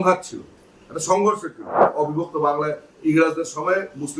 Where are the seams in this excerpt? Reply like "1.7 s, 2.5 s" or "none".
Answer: 1.8 s